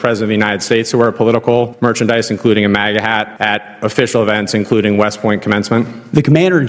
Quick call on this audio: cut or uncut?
cut